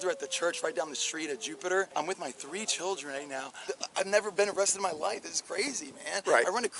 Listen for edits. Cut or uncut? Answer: cut